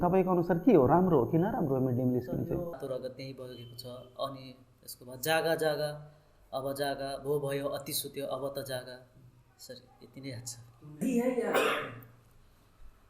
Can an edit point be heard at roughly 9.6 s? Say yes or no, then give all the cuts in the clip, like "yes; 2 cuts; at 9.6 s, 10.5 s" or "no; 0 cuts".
no; 2 cuts; at 2.7 s, 11.0 s